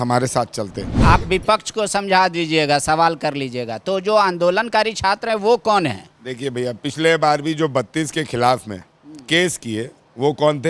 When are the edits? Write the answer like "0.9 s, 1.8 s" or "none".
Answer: 0.9 s